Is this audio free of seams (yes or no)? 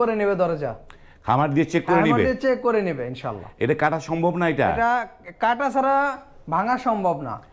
yes